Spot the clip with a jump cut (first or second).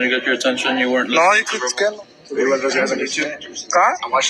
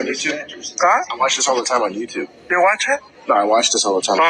first